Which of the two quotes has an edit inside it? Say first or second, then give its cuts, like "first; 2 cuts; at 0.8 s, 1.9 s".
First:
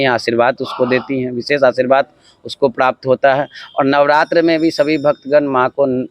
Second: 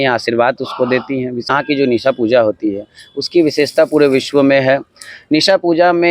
second; 1 cut; at 1.5 s